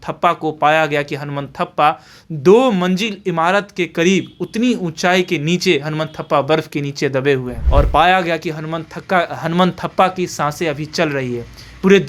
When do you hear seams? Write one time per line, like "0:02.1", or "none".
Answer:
0:07.6